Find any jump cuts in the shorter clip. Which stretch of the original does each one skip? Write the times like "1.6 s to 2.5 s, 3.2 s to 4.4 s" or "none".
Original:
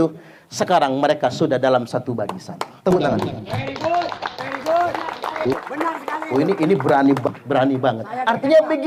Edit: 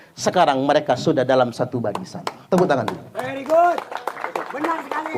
3.5 s to 4.3 s

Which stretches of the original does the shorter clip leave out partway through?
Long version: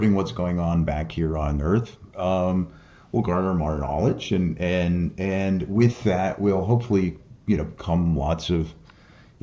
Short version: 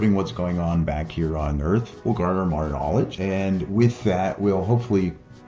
1.9 s to 3.0 s, 4.2 s to 5.1 s

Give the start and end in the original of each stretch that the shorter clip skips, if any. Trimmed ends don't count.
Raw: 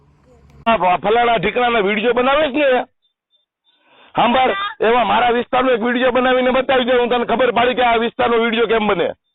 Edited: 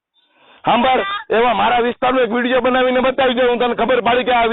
none

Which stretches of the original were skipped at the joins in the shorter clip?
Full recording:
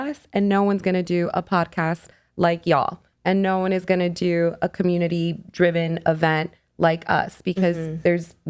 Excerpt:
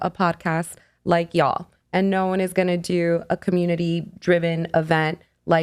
none

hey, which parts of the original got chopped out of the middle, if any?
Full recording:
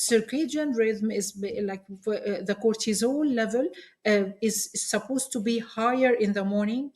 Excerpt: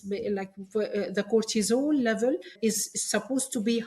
3.9 s to 4.3 s

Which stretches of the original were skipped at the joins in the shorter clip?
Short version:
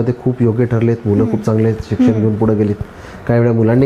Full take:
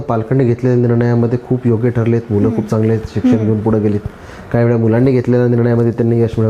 none

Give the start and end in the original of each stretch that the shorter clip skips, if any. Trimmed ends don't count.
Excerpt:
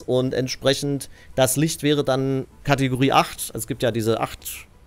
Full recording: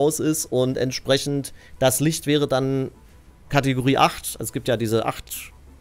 3.0 s to 3.4 s

